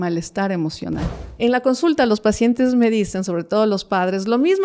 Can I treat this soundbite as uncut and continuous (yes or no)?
no